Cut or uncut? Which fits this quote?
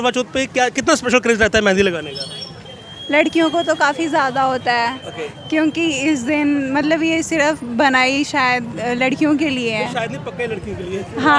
uncut